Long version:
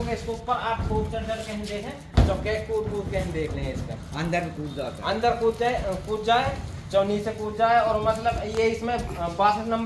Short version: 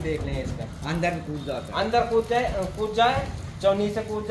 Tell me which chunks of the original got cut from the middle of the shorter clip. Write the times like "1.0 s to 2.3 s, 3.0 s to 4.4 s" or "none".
none